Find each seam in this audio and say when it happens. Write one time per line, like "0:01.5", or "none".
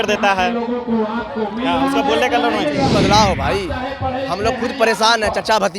0:02.9